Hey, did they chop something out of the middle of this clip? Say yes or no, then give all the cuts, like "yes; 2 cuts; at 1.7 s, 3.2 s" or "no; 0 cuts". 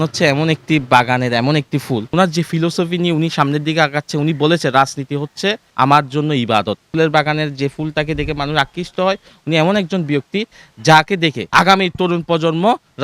yes; 4 cuts; at 2.1 s, 5.7 s, 6.9 s, 11.4 s